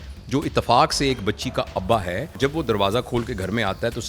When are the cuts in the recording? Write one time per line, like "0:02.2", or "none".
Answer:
0:02.4